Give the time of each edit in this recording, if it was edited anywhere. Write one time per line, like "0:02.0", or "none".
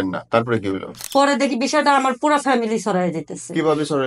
0:01.0